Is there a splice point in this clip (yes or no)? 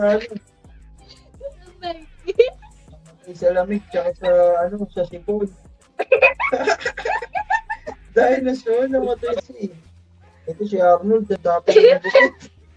yes